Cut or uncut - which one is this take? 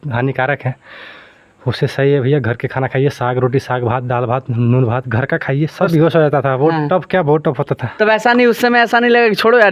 cut